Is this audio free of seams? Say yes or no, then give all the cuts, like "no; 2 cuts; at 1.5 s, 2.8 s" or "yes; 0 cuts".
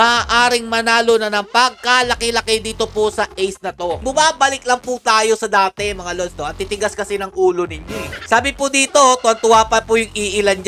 no; 2 cuts; at 4.0 s, 8.2 s